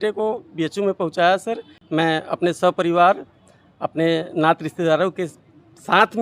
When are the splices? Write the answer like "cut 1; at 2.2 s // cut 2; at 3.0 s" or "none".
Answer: none